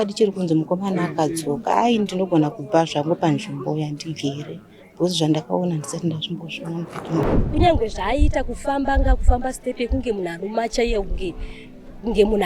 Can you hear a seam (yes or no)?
yes